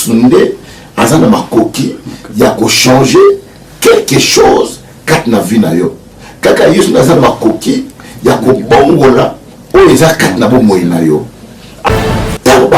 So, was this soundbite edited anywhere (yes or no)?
yes